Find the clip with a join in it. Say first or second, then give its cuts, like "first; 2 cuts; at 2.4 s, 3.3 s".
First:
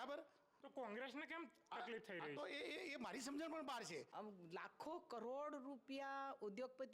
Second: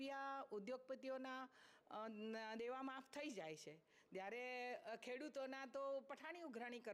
first; 1 cut; at 4.1 s